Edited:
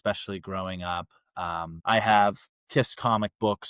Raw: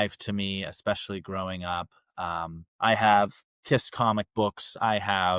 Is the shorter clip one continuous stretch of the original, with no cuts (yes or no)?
no